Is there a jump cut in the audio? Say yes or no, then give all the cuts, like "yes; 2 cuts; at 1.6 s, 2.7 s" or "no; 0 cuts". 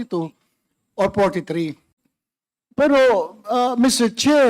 yes; 1 cut; at 1.9 s